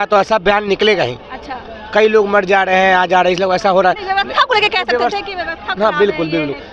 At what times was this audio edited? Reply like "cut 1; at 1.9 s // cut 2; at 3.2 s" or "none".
none